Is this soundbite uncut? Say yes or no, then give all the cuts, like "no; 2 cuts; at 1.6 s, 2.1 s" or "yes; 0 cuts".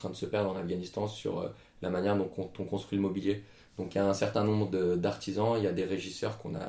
yes; 0 cuts